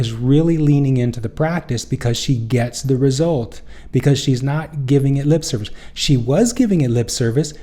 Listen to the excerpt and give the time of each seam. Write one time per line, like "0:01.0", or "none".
none